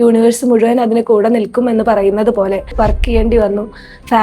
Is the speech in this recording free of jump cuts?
no; 1 cut; at 2.7 s

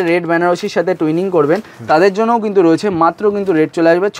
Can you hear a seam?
no; 0 cuts

